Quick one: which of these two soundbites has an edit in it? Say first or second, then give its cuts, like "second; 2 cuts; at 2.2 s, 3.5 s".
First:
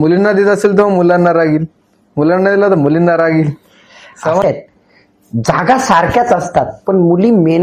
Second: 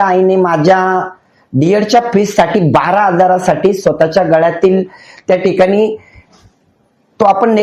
first; 1 cut; at 4.4 s